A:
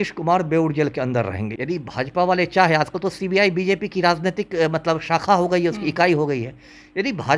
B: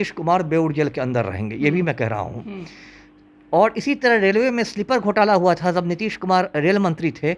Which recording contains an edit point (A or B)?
A